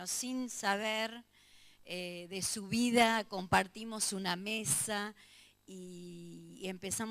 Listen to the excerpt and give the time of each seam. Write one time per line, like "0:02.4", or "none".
0:04.4